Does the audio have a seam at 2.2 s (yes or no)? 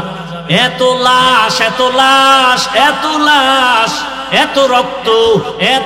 no